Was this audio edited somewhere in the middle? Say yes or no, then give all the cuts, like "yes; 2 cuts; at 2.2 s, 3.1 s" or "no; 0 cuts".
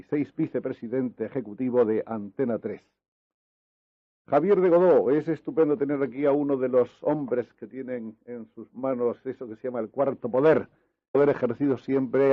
no; 0 cuts